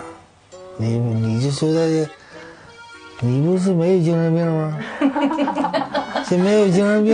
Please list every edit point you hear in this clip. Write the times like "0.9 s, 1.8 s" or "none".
none

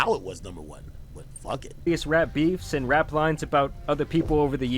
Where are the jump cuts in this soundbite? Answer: 1.9 s

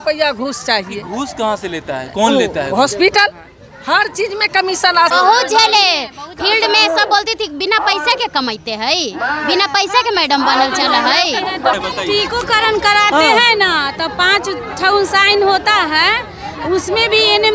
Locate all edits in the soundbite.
5.1 s, 11.7 s

